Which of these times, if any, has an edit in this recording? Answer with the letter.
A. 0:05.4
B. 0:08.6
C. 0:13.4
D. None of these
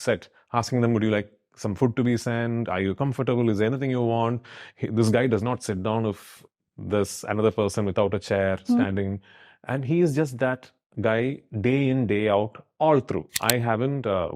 C